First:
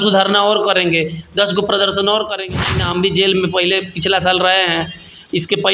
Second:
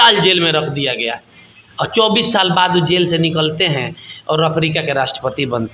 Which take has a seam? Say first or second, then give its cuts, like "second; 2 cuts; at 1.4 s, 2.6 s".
first; 1 cut; at 2.6 s